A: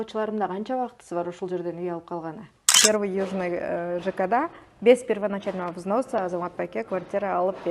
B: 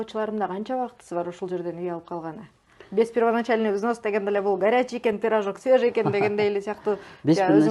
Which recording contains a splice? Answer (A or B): A